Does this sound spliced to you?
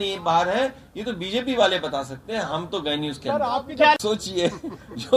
no; 0 cuts

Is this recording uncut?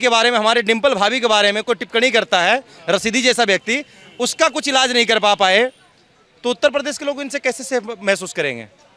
yes; 0 cuts

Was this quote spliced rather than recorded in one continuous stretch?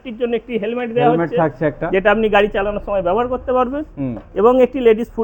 no; 0 cuts

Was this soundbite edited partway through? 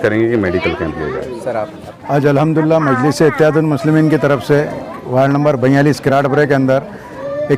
no; 0 cuts

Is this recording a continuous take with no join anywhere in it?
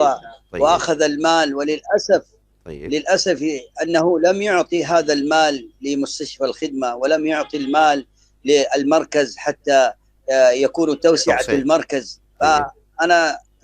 yes; 0 cuts

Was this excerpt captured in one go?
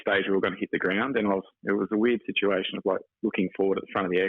no; 1 cut; at 1.5 s

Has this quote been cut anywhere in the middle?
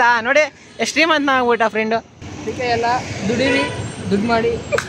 no; 0 cuts

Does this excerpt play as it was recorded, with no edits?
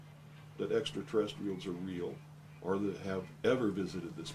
yes; 0 cuts

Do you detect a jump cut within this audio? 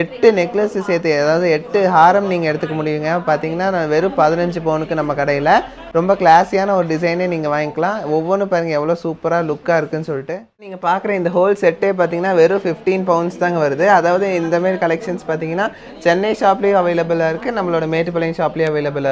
no; 0 cuts

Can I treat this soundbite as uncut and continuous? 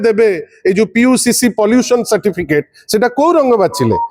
yes; 0 cuts

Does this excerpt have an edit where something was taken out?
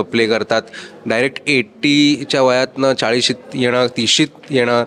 no; 0 cuts

